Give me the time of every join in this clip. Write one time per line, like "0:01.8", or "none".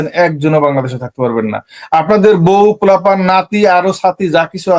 none